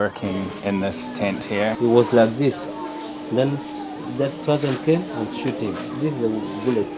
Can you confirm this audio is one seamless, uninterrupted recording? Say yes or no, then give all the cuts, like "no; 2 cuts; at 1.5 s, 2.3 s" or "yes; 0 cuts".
yes; 0 cuts